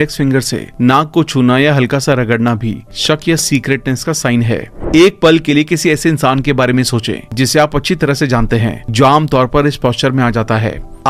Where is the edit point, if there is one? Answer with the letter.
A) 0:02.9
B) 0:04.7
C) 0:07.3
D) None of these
B